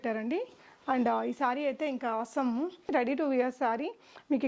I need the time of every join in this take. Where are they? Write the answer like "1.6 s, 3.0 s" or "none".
2.9 s